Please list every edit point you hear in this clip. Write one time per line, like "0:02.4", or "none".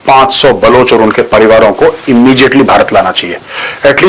none